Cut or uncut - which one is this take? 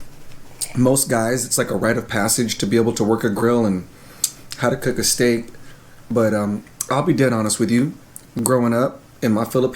uncut